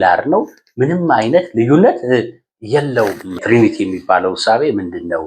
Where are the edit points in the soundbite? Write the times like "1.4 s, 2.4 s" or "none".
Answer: 3.4 s